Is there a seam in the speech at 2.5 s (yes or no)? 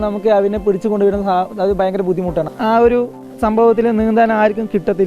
yes